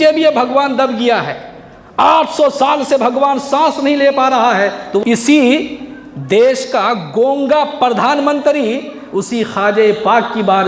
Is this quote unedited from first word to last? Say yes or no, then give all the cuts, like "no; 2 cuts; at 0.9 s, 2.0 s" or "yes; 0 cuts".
no; 1 cut; at 5.0 s